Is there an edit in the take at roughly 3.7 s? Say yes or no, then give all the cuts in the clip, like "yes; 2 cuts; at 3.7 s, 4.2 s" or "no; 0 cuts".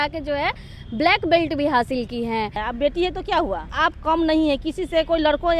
yes; 2 cuts; at 2.6 s, 3.7 s